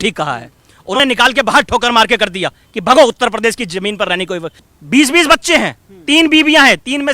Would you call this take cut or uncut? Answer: cut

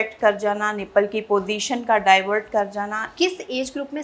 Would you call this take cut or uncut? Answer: cut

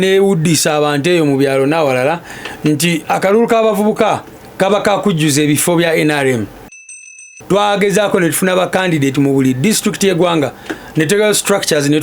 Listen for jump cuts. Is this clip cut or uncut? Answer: cut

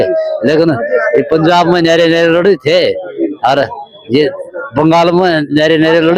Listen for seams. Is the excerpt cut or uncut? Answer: uncut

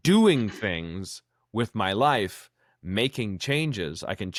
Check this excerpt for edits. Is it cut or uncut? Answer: uncut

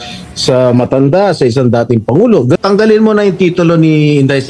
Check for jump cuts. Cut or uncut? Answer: cut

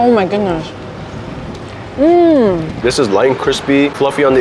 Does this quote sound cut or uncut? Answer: cut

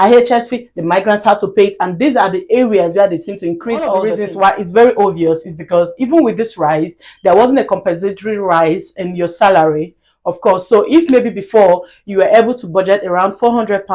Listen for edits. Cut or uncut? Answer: cut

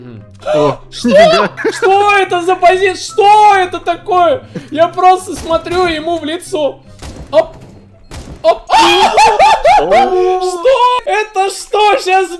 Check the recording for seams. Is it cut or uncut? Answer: cut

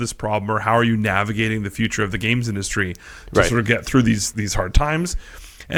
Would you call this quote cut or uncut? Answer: uncut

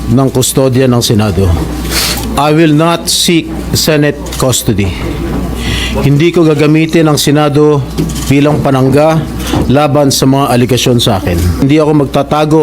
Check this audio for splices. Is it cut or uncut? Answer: cut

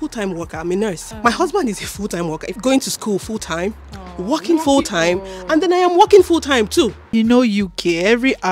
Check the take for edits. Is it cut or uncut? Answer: cut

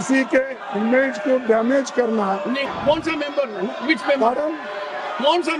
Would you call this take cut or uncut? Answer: cut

